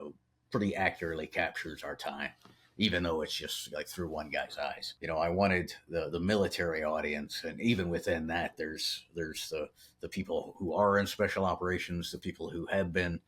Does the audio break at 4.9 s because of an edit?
yes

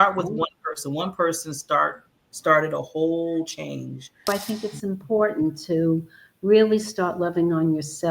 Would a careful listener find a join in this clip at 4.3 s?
yes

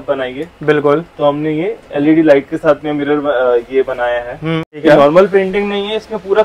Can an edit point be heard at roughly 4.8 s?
yes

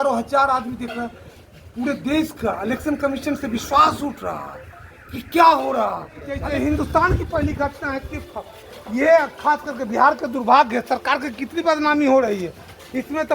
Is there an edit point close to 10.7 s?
no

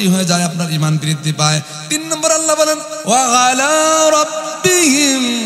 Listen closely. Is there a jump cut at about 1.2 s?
no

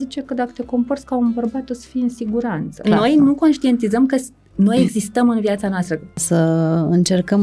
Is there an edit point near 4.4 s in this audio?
no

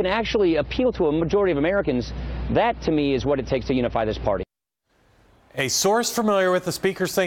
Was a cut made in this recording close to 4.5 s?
yes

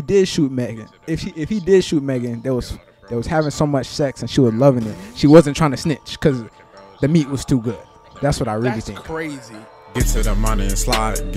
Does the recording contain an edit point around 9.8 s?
yes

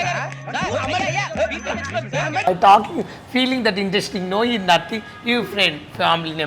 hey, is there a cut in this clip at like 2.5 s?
yes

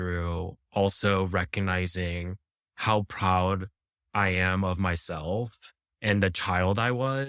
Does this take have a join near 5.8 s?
yes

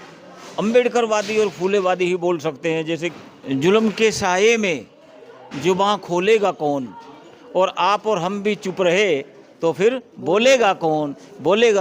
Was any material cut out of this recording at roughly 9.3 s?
no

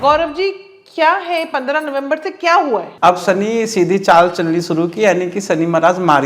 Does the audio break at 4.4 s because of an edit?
no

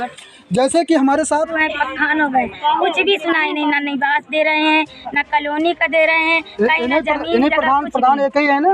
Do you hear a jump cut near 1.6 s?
yes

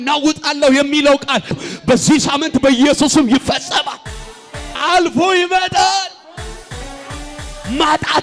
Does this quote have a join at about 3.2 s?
no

